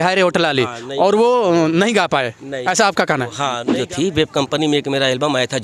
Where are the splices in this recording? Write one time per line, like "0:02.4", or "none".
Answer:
0:03.6